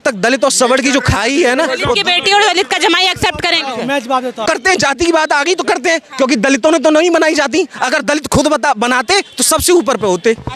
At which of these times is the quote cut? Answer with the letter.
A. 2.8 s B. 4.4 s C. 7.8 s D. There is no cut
B